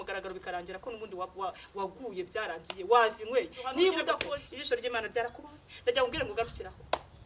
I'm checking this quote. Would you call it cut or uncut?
cut